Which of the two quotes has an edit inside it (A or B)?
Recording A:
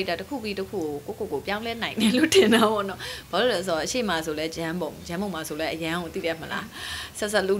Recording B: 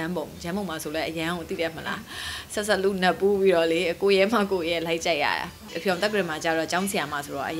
B